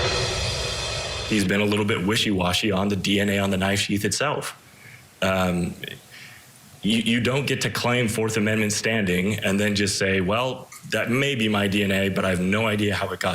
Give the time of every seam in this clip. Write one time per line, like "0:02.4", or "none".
0:01.1